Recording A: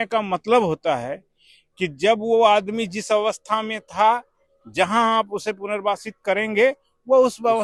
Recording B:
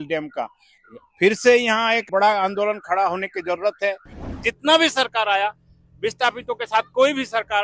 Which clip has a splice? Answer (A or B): B